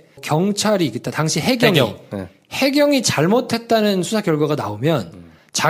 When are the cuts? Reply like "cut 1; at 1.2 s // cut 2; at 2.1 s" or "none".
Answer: cut 1; at 2.4 s